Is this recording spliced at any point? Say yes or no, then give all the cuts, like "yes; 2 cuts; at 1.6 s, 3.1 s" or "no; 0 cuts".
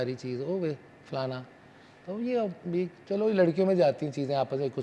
no; 0 cuts